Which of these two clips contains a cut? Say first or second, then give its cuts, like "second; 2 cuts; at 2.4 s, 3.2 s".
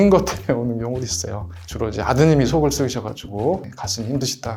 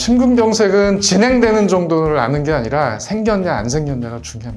first; 1 cut; at 1.5 s